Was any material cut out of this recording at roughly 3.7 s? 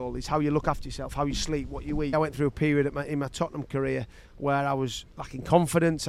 no; 1 cut; at 2.1 s

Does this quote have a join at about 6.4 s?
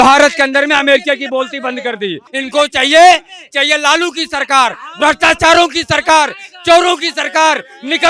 no; 1 cut; at 2.3 s

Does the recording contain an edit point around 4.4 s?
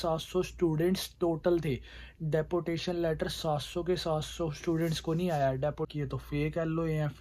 no; 1 cut; at 5.9 s

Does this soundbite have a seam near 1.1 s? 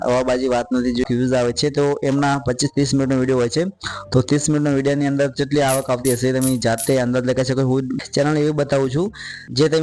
yes; 2 cuts; at 1.1 s, 8.0 s

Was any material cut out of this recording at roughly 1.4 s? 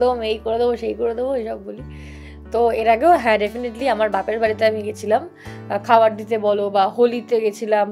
no; 0 cuts

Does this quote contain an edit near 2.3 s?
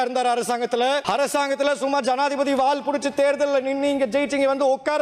no; 1 cut; at 1.0 s

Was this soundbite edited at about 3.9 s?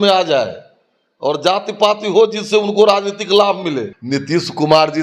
yes; 1 cut; at 3.9 s

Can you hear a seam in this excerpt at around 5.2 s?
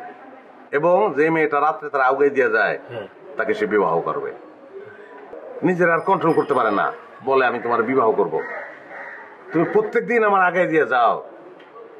yes; 1 cut; at 5.2 s

